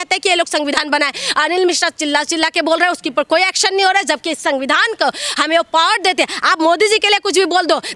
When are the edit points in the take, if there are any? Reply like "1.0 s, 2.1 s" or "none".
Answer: none

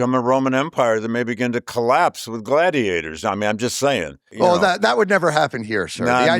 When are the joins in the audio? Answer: 4.2 s

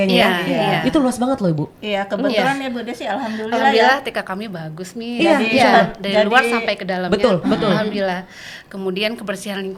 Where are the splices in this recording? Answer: none

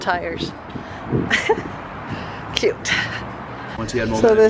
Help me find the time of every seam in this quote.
none

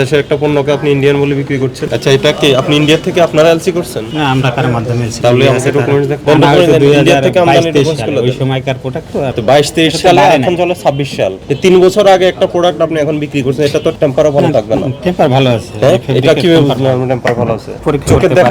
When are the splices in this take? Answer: 1.8 s, 5.1 s, 6.2 s, 9.4 s, 13.9 s

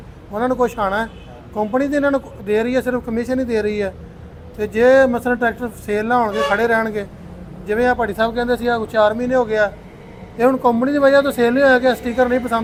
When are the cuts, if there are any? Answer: none

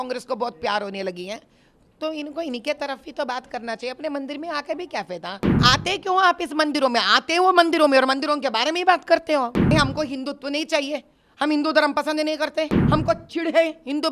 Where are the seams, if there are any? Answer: 5.6 s, 9.7 s, 12.8 s

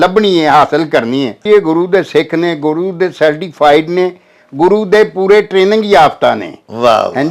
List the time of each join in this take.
1.4 s

